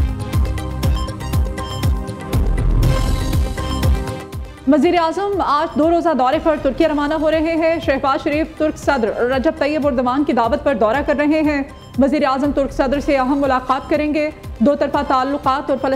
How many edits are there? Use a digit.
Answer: 1